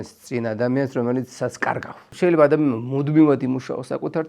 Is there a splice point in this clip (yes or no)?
yes